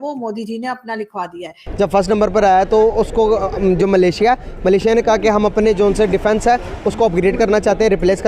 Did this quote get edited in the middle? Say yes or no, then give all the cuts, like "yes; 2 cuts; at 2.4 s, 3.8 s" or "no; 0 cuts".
yes; 1 cut; at 1.6 s